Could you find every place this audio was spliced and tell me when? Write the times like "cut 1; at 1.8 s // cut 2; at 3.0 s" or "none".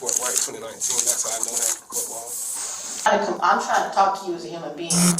cut 1; at 3.1 s